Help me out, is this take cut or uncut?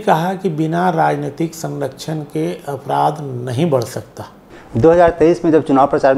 cut